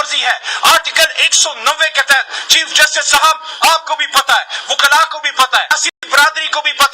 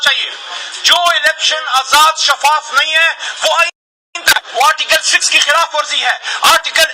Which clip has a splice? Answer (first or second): first